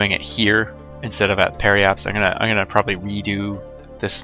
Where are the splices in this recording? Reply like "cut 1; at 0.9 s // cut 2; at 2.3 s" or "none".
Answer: cut 1; at 2.7 s